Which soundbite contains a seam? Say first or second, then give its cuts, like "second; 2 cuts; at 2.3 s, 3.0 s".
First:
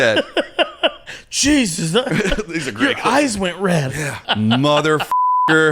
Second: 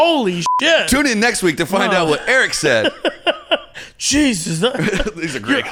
first; 1 cut; at 4.2 s